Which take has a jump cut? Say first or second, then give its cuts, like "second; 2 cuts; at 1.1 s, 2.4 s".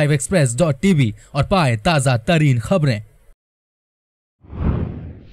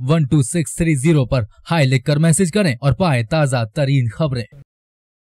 first; 1 cut; at 4.1 s